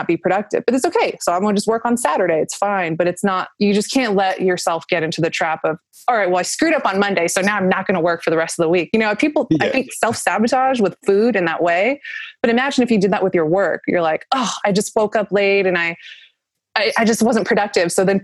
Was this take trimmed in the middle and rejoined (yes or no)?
no